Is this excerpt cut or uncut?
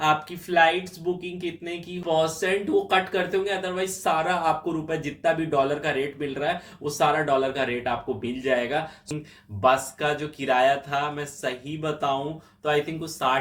cut